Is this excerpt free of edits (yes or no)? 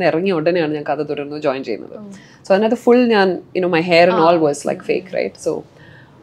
yes